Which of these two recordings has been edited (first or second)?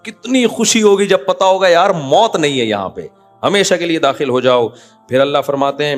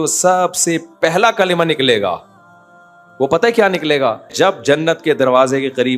second